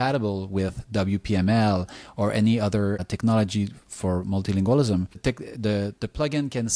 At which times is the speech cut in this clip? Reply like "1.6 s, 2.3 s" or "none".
none